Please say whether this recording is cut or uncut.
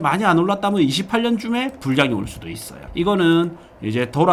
uncut